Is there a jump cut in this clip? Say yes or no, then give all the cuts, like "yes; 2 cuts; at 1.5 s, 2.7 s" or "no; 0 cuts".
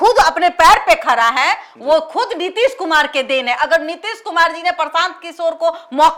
no; 0 cuts